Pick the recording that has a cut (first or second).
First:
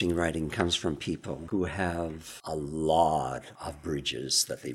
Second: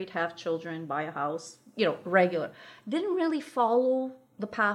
first